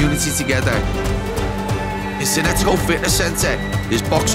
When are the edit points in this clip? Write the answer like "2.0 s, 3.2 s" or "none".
none